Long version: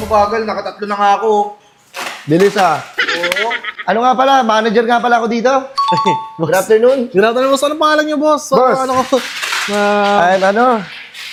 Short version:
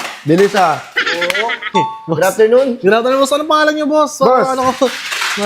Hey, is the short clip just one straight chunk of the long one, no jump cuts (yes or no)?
no